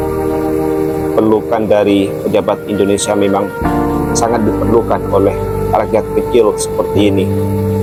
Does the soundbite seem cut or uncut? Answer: uncut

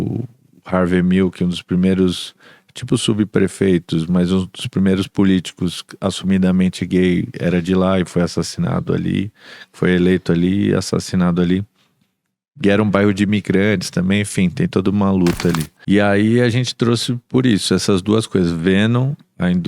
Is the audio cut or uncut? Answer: cut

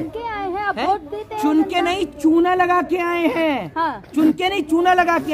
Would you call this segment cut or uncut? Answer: uncut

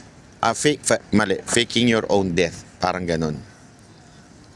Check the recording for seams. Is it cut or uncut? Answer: uncut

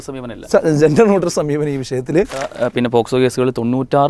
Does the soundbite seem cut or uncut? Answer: cut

